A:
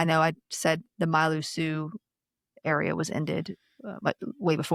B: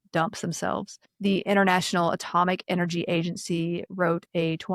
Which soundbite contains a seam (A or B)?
B